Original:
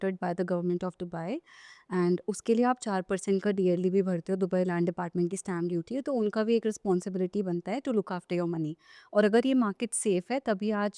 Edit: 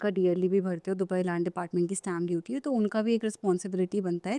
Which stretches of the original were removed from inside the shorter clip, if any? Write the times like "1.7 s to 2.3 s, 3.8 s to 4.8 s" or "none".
none